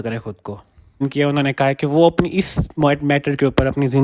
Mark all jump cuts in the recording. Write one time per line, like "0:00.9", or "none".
0:01.0